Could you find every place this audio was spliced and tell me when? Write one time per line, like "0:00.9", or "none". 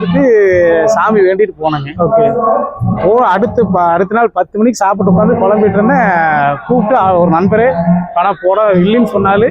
none